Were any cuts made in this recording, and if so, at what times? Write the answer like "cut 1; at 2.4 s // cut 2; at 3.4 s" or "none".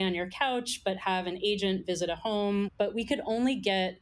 cut 1; at 2.7 s